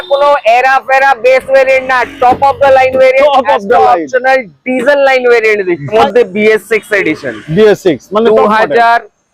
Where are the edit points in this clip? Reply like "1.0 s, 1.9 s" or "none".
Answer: 5.9 s